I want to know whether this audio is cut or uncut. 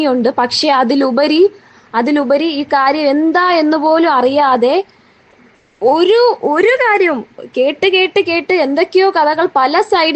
uncut